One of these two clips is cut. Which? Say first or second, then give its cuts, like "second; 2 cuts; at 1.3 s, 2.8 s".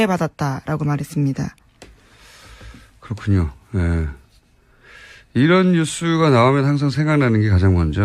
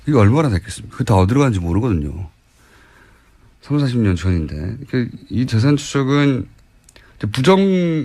first; 1 cut; at 3.8 s